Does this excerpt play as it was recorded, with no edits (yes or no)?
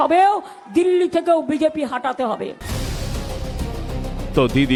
yes